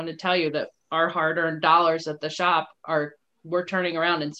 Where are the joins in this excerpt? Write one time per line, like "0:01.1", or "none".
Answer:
none